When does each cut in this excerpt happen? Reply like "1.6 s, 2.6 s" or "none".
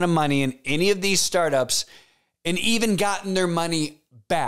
none